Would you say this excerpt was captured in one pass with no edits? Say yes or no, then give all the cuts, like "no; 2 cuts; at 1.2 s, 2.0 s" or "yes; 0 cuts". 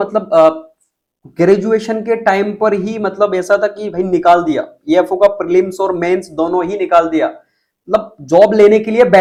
yes; 0 cuts